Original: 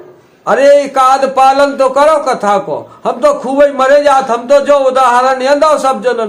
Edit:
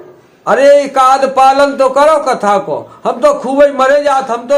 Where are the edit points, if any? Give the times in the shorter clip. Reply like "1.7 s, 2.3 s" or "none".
none